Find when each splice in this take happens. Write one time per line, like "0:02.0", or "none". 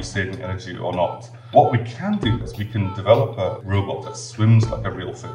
0:01.5
0:02.4
0:04.0